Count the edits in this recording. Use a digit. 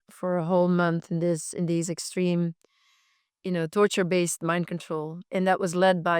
1